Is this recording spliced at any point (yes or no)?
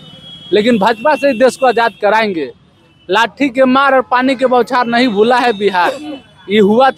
no